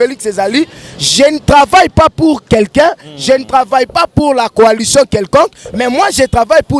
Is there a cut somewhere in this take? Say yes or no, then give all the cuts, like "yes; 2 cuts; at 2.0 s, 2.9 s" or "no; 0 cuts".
no; 0 cuts